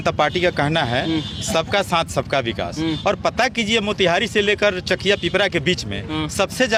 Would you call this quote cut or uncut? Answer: uncut